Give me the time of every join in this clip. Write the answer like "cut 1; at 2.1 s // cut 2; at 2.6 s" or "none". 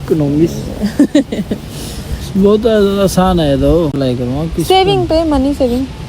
cut 1; at 3.9 s